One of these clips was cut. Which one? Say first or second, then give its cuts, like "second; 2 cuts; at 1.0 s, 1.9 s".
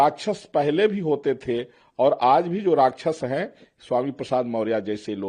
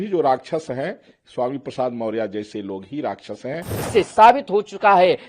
second; 1 cut; at 3.7 s